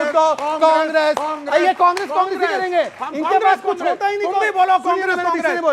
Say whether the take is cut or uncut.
uncut